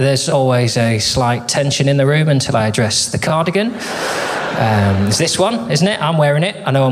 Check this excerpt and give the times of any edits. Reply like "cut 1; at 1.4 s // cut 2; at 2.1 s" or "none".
none